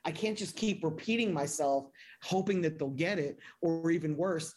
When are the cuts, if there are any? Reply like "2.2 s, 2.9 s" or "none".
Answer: none

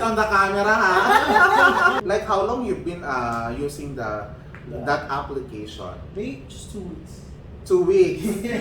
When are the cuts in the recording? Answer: 2.0 s

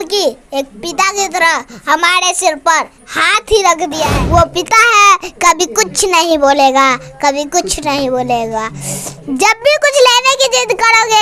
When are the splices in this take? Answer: 4.1 s

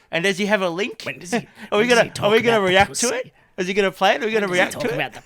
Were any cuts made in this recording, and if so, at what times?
none

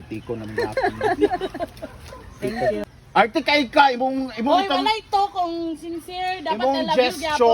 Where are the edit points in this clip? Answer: 2.9 s

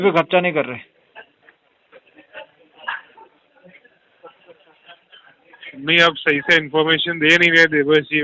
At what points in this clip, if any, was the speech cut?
none

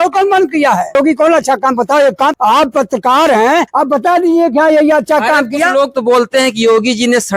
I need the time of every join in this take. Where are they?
0.9 s, 2.4 s, 3.7 s

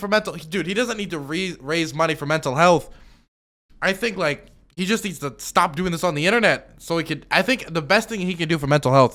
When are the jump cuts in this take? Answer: none

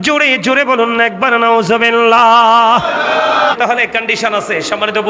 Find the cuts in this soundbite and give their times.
3.6 s

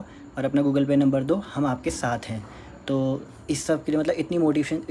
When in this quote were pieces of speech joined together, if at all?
none

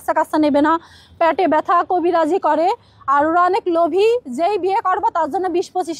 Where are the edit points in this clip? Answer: none

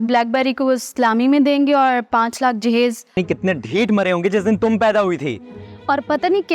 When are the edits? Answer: 3.2 s

